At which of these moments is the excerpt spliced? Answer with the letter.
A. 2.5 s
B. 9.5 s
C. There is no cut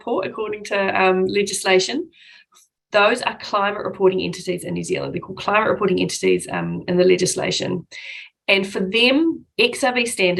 C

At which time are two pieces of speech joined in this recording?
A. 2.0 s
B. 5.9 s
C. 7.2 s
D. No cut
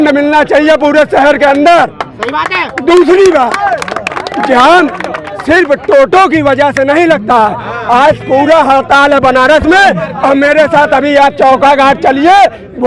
D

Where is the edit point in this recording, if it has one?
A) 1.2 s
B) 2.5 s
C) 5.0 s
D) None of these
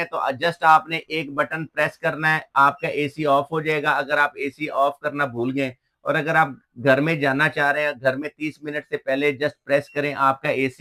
D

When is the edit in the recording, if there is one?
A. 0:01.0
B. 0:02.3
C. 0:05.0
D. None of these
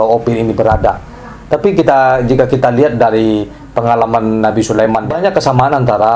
C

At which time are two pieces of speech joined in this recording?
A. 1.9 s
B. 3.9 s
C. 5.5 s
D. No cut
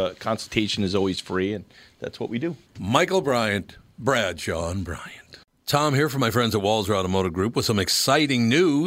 C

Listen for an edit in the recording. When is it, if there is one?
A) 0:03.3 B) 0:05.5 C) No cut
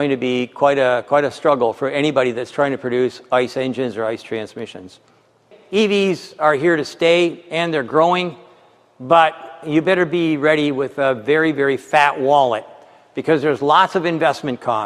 B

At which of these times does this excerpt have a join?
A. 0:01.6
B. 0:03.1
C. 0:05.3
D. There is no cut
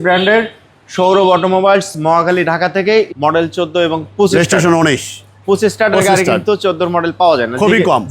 B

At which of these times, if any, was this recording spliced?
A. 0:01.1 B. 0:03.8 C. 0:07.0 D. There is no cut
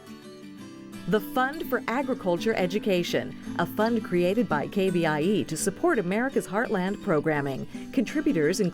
A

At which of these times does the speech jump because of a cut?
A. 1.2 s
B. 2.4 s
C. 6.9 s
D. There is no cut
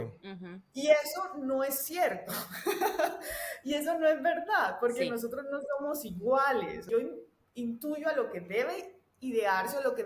C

